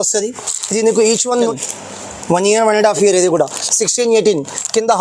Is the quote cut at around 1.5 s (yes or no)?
yes